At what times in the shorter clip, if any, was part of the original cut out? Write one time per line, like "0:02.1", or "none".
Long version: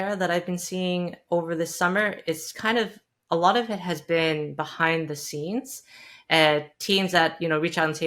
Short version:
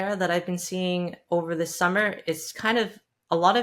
none